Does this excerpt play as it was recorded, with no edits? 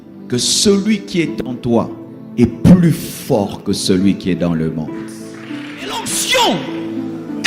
no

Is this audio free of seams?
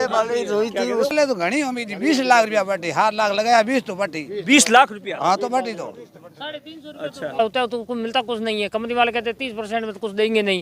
no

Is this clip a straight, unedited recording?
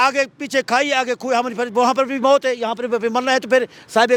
yes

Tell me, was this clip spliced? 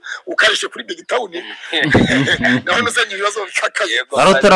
no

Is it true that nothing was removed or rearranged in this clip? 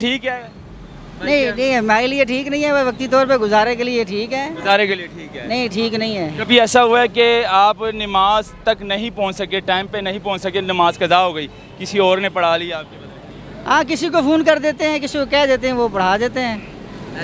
yes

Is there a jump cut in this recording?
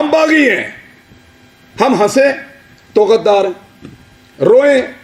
no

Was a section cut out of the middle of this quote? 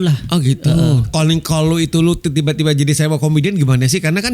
yes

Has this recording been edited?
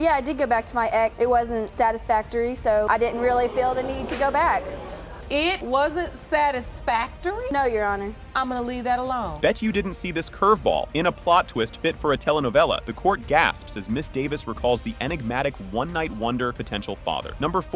no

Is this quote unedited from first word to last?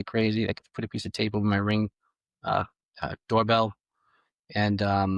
yes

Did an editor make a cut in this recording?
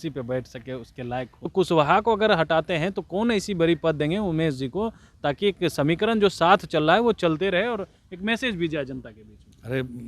yes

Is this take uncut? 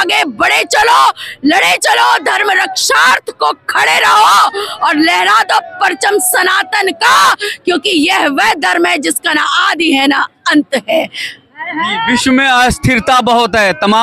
yes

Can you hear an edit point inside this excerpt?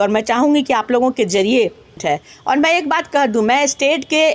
yes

